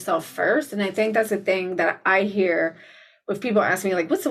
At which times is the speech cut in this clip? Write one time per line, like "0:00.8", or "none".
none